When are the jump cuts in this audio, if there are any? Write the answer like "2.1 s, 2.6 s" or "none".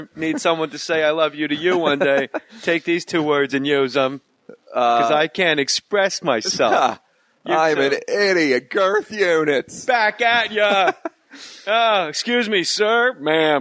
4.2 s